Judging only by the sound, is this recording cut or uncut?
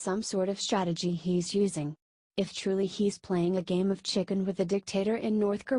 cut